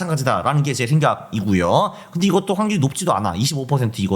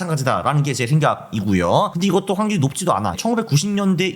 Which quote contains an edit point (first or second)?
second